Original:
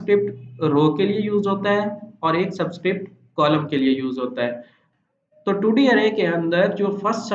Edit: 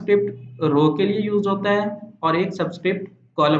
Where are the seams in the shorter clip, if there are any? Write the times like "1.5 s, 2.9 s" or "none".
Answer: none